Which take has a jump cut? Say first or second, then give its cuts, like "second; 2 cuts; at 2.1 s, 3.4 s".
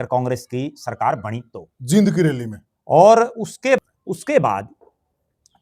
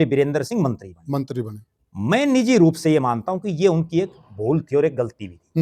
first; 1 cut; at 3.8 s